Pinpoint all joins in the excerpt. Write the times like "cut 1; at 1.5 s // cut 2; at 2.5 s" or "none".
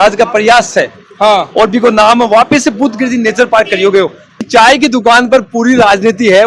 cut 1; at 4.4 s